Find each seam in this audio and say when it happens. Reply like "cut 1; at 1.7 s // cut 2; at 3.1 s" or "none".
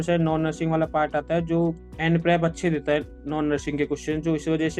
cut 1; at 1.9 s